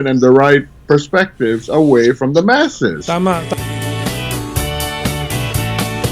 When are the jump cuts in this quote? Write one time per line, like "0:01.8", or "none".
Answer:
0:03.5